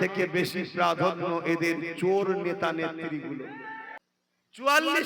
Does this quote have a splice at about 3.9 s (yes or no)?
yes